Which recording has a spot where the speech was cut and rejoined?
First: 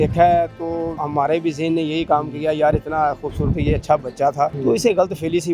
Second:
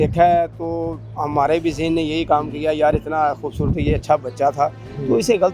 first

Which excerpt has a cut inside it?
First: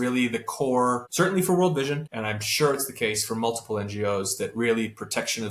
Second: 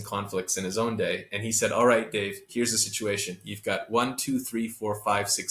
first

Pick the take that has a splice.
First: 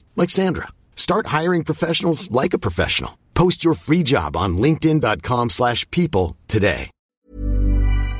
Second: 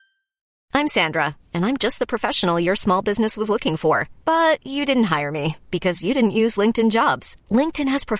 first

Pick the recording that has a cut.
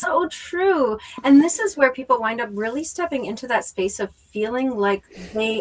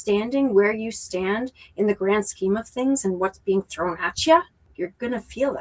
second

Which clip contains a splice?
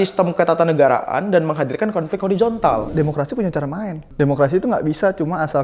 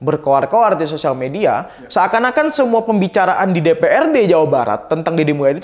first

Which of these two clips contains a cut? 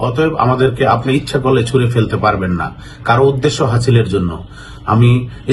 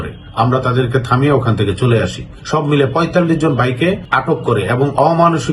second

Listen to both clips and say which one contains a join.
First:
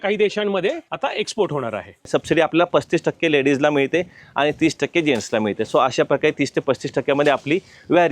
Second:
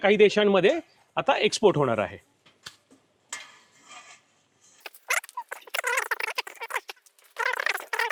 first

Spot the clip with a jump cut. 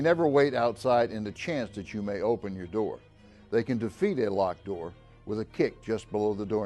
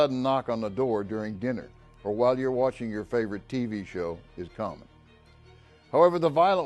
first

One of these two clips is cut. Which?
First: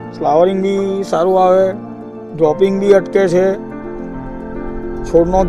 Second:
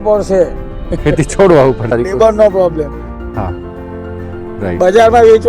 second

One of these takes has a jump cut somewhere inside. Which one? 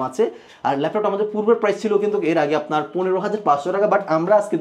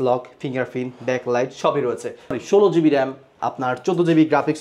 second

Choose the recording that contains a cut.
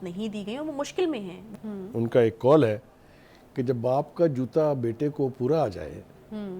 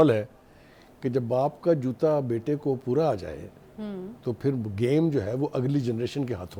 first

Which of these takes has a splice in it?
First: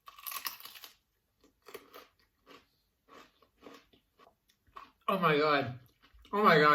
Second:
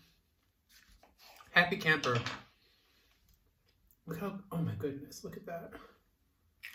first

